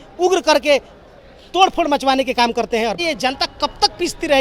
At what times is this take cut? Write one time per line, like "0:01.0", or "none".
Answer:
0:03.0